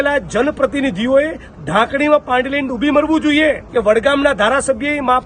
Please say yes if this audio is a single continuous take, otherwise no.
no